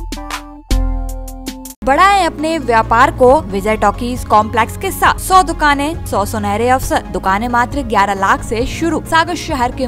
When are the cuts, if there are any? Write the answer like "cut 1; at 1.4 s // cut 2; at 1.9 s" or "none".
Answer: cut 1; at 1.8 s // cut 2; at 3.5 s // cut 3; at 5.2 s // cut 4; at 6.0 s // cut 5; at 7.1 s // cut 6; at 9.0 s